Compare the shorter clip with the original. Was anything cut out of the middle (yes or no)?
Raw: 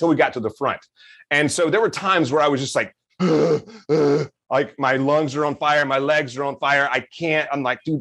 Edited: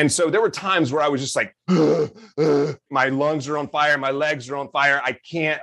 yes